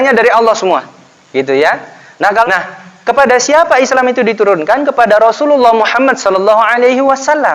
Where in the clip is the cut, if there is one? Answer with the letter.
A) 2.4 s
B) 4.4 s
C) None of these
A